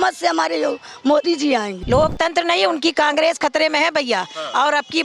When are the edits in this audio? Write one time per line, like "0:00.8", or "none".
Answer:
0:01.7